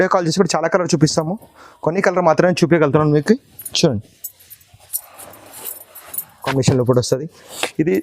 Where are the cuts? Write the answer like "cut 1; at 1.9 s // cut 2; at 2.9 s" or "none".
cut 1; at 6.5 s